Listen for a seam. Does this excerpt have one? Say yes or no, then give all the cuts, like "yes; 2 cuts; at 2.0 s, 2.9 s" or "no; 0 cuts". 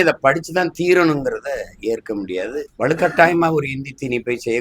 yes; 1 cut; at 2.7 s